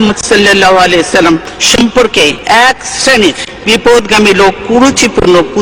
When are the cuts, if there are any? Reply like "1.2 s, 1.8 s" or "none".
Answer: 1.5 s, 2.4 s, 3.5 s